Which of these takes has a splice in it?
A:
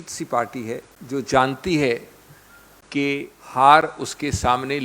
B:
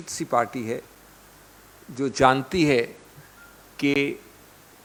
A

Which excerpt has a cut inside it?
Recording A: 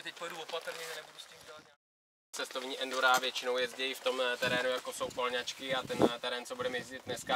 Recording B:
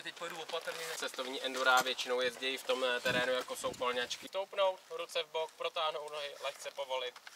B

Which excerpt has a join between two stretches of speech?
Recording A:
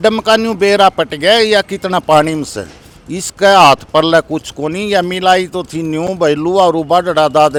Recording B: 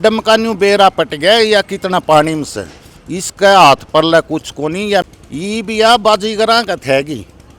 B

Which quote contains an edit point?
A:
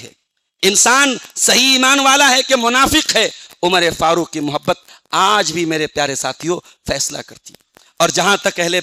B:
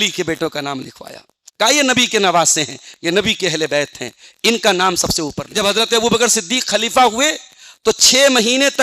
B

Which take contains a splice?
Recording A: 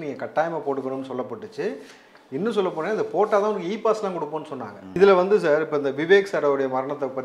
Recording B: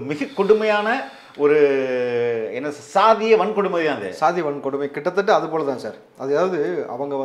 A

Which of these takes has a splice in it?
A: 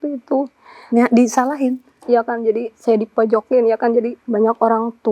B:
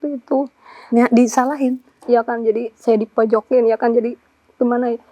A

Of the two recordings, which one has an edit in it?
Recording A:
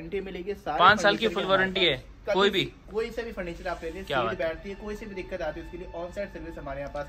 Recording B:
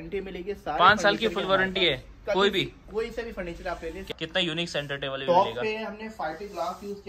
B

